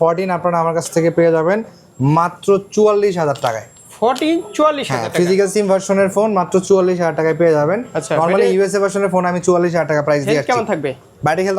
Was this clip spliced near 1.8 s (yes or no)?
no